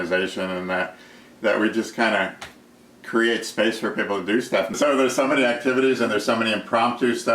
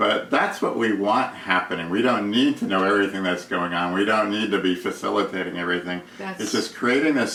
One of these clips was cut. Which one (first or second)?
first